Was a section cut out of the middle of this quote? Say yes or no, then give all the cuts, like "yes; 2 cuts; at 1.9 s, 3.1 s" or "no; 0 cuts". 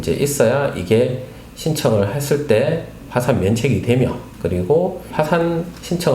yes; 2 cuts; at 4.3 s, 5.1 s